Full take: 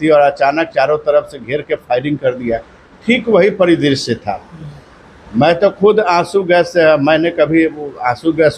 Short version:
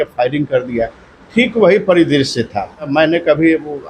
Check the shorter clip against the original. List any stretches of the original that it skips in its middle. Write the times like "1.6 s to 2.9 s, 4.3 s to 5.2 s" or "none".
4.6 s to 7.0 s